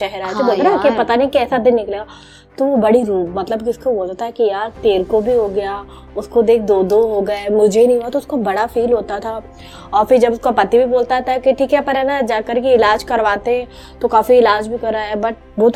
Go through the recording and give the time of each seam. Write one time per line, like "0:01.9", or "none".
none